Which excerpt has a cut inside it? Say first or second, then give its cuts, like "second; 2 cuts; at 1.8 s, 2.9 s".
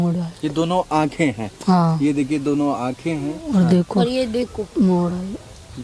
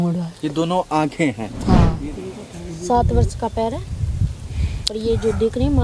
second; 1 cut; at 1.9 s